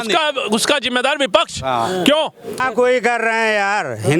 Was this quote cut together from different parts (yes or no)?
yes